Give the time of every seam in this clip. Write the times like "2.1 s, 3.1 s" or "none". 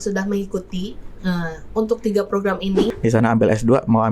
2.9 s